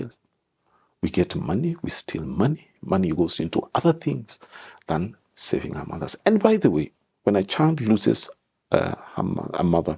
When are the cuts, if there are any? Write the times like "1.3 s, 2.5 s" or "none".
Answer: 7.0 s